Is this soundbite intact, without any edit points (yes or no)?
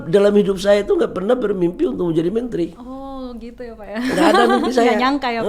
yes